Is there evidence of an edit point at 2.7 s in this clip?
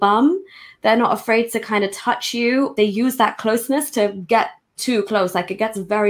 yes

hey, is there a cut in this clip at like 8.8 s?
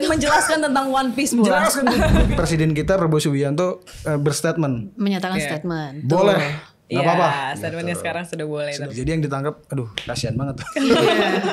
yes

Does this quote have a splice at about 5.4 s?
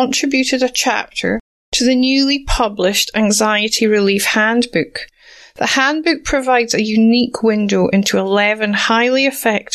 no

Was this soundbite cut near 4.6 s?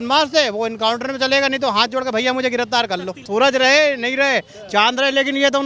no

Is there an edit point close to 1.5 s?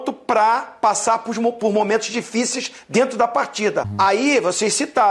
no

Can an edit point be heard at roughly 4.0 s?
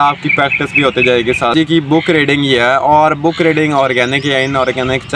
no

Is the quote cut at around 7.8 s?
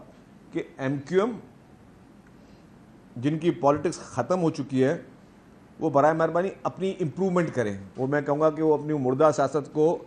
yes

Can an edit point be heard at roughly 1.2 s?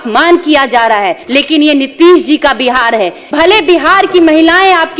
yes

